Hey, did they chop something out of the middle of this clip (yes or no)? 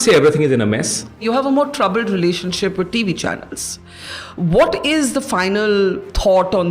yes